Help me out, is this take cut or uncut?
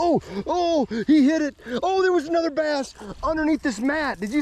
uncut